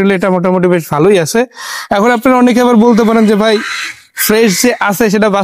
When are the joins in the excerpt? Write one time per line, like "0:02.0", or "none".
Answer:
none